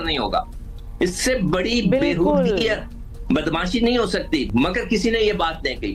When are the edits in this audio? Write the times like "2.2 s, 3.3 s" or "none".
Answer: none